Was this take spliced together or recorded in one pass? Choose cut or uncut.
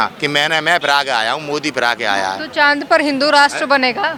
uncut